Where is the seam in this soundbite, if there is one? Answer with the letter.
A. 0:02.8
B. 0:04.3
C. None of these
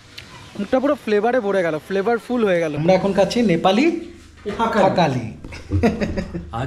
A